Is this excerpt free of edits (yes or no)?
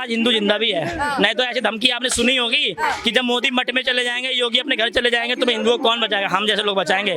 yes